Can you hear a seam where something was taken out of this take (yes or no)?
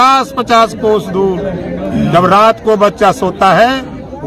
no